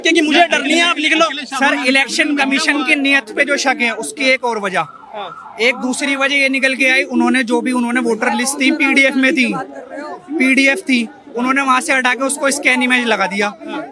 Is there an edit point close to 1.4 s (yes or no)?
no